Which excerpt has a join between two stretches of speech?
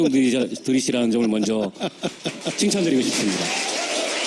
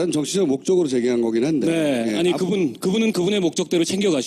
first; 1 cut; at 3.0 s

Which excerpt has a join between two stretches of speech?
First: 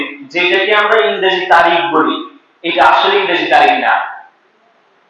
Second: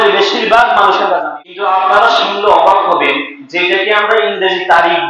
second; 1 cut; at 1.2 s

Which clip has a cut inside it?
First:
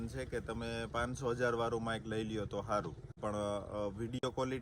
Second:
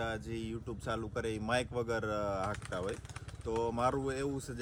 first; 1 cut; at 3.1 s

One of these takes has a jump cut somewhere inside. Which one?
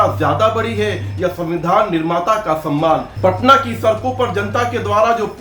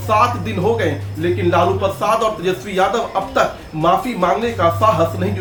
first; 1 cut; at 3.1 s

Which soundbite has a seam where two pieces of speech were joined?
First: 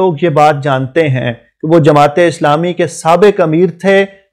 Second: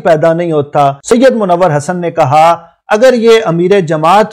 second; 1 cut; at 1.0 s

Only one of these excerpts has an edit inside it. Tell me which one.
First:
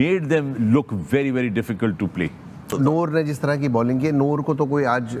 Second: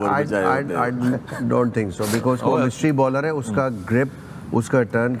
first; 1 cut; at 2.6 s

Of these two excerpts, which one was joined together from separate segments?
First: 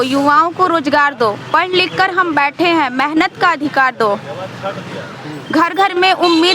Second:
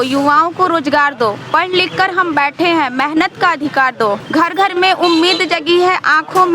second; 1 cut; at 4.2 s

